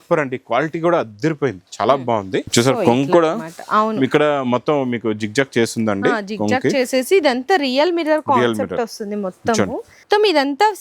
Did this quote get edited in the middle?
yes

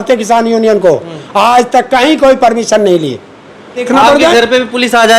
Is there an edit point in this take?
yes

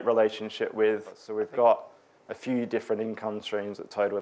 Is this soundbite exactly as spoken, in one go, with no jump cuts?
no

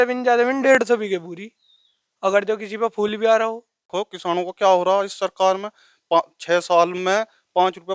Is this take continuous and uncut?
no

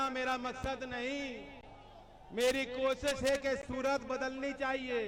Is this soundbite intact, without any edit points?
yes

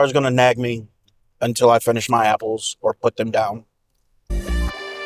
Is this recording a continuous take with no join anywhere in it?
yes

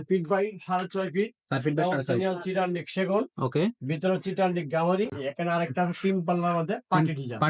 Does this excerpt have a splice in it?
yes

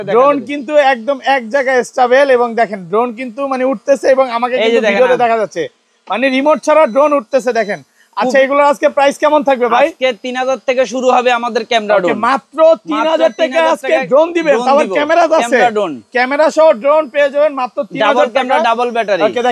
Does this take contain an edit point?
no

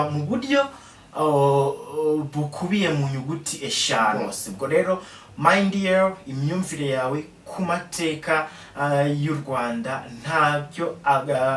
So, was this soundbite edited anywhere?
yes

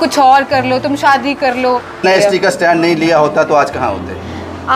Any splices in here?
yes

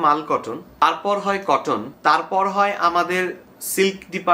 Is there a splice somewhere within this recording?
yes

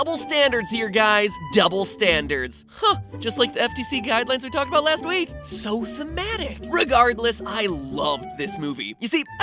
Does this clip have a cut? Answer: yes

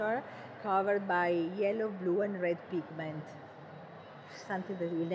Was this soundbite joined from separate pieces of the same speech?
no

